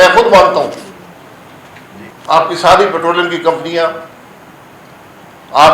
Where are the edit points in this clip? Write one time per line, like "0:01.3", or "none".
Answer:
0:02.1